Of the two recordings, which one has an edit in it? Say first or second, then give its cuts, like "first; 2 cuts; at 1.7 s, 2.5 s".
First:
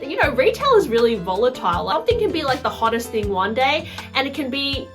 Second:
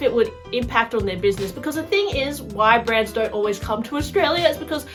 first; 1 cut; at 1.9 s